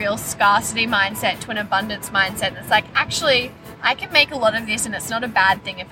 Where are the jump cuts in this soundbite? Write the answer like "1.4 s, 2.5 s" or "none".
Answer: none